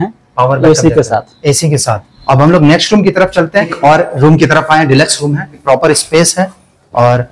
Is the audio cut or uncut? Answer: cut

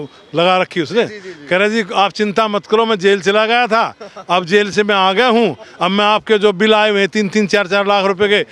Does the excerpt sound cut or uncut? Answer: uncut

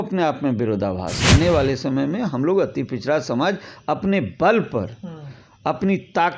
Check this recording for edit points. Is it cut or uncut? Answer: cut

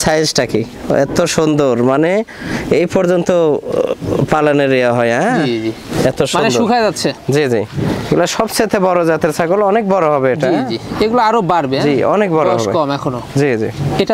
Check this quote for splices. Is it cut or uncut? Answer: uncut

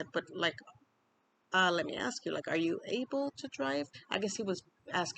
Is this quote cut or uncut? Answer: cut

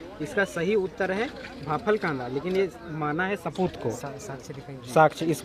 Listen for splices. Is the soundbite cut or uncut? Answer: uncut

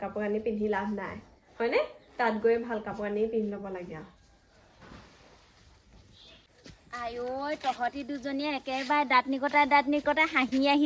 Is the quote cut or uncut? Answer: cut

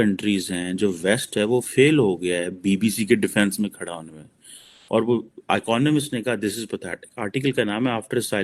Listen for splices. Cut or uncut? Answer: uncut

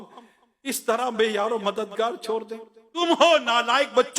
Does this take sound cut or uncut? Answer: cut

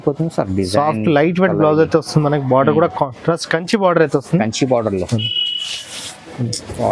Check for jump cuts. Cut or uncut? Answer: uncut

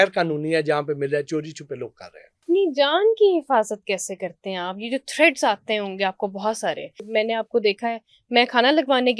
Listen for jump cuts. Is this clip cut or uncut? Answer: cut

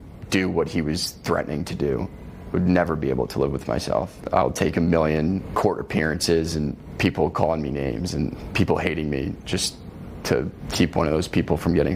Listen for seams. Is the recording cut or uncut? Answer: cut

